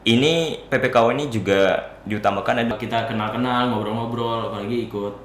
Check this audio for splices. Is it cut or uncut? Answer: cut